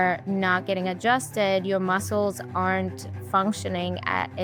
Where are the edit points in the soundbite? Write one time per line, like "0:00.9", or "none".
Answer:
none